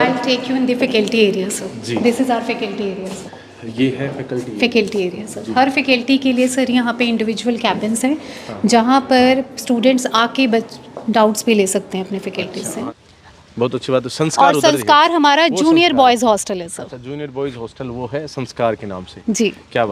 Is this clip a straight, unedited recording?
no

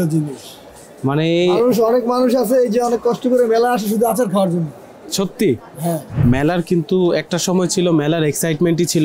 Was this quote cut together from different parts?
yes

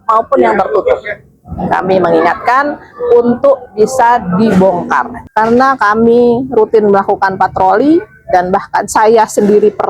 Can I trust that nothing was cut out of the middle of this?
no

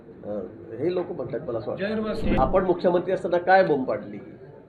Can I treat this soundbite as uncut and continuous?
no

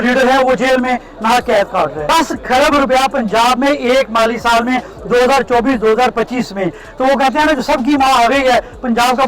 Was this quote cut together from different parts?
yes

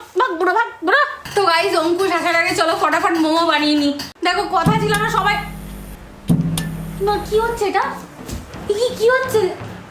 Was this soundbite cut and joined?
yes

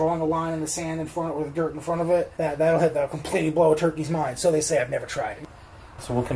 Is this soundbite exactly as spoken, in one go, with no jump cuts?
no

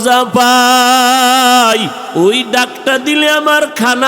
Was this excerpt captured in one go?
no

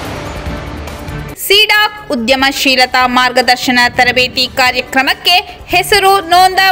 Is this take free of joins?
yes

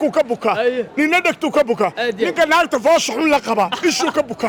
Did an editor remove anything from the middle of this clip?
no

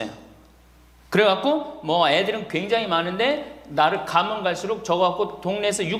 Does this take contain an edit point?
no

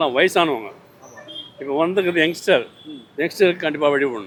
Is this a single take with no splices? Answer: yes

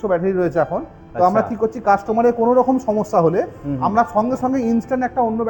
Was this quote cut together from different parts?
no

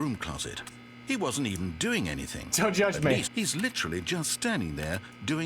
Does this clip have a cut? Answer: yes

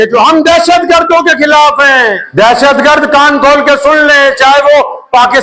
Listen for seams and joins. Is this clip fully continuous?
no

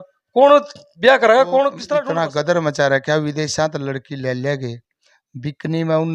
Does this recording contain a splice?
yes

